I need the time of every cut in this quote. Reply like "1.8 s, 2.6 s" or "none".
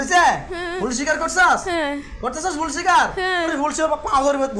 3.5 s